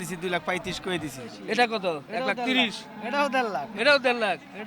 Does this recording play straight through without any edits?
no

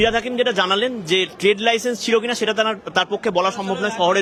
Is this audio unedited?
yes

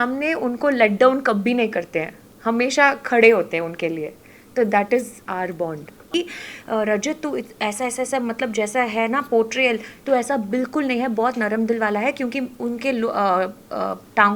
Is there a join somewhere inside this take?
yes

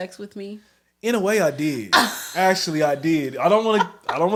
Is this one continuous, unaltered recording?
yes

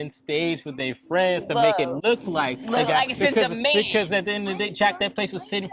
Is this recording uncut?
yes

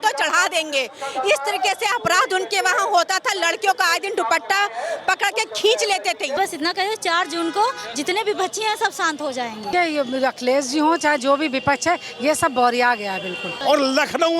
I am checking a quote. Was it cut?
yes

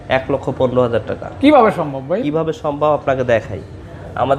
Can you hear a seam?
no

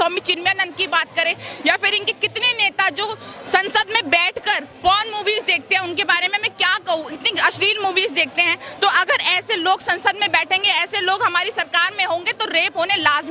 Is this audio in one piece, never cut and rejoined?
yes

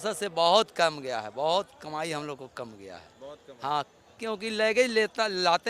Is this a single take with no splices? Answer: yes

